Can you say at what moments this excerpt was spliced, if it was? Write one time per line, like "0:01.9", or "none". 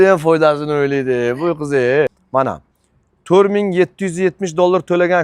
0:02.2